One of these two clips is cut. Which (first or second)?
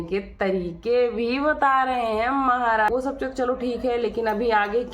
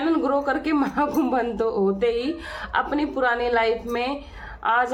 first